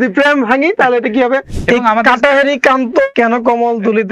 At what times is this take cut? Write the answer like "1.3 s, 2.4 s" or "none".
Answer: 1.5 s, 3.1 s